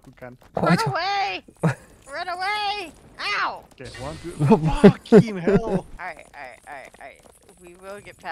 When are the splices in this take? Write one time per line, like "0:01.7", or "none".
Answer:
0:03.7
0:05.9